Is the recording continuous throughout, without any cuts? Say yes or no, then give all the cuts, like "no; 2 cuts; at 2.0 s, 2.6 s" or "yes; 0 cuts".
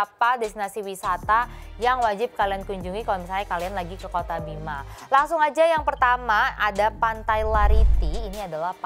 yes; 0 cuts